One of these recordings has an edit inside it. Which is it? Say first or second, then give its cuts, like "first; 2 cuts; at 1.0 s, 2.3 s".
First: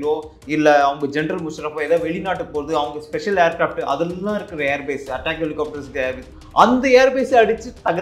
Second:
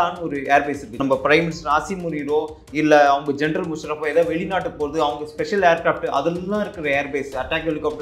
second; 1 cut; at 0.9 s